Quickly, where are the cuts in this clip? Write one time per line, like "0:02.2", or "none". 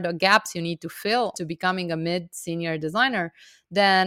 0:01.3